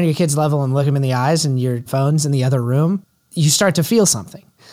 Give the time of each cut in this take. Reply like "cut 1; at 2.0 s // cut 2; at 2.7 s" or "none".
cut 1; at 0.9 s // cut 2; at 1.8 s // cut 3; at 3.2 s